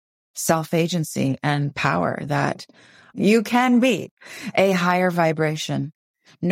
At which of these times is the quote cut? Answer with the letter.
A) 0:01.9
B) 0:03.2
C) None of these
B